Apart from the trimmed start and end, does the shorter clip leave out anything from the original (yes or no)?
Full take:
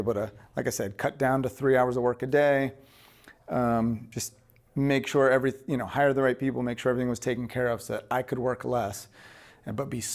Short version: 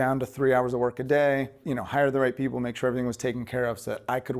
yes